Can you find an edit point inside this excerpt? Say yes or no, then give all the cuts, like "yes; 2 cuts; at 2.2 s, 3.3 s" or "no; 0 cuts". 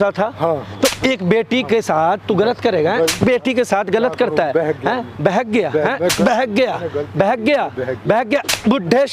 no; 0 cuts